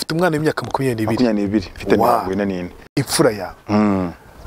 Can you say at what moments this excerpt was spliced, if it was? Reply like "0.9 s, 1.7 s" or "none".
2.9 s